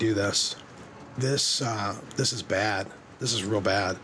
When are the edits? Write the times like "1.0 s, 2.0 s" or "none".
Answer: none